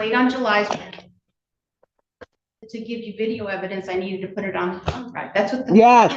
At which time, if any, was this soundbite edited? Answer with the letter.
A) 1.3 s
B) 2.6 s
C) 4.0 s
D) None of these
B